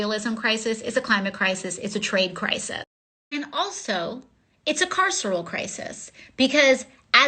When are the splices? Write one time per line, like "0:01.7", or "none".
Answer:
0:01.1

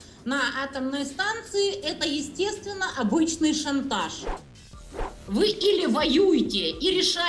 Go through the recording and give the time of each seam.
0:04.6

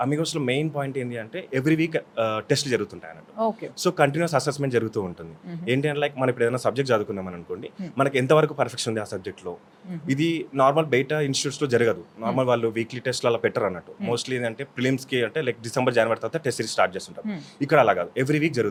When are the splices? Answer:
none

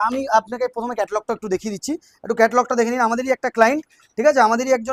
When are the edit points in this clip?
none

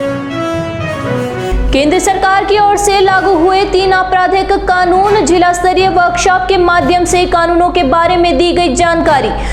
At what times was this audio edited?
0:01.5

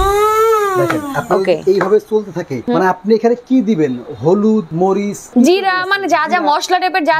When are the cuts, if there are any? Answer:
0:02.7
0:05.1

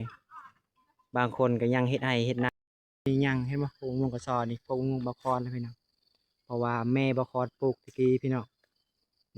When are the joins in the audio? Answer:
0:02.5

